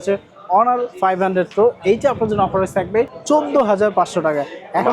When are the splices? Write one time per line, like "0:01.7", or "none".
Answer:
0:03.2